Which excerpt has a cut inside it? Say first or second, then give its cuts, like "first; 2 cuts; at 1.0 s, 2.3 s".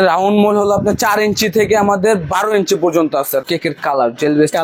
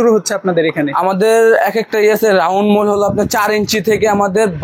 first; 1 cut; at 3.4 s